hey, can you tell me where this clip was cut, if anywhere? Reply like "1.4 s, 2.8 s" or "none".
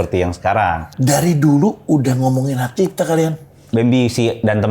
0.9 s